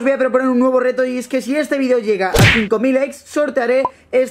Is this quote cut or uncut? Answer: uncut